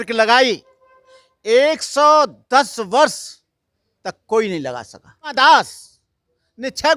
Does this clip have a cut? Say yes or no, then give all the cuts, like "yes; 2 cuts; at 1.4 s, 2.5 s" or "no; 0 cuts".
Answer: yes; 1 cut; at 5.3 s